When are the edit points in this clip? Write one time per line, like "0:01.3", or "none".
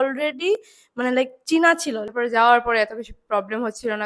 0:02.0